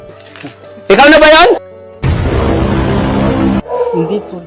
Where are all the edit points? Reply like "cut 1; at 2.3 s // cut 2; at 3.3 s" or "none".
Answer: none